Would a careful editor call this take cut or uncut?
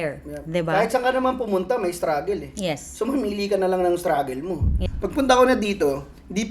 cut